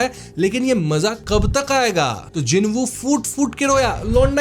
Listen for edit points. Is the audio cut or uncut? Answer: cut